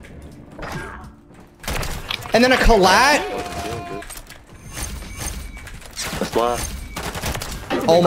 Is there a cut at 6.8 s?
no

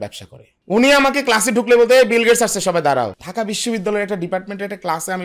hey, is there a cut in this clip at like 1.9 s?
no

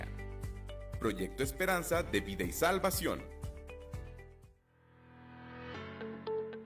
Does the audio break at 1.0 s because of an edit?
no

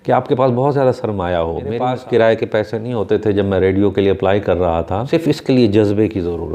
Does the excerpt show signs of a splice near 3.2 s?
no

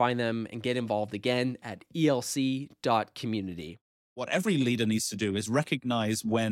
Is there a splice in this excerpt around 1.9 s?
no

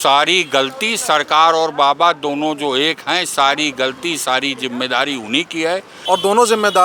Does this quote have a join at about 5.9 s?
yes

